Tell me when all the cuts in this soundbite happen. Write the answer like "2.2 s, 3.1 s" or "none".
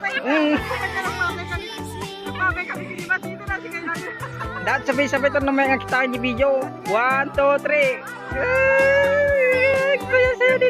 9.6 s